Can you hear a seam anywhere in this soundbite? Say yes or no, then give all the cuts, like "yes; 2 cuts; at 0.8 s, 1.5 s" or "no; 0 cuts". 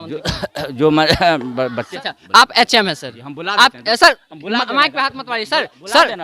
yes; 1 cut; at 1.9 s